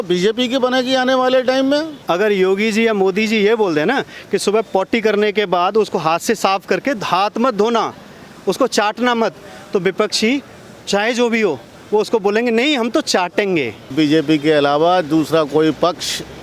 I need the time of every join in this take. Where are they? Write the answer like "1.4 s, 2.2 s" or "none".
1.9 s, 13.8 s